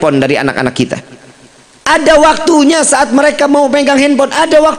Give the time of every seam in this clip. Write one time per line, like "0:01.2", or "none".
none